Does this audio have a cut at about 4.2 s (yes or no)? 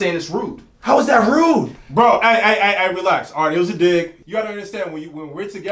yes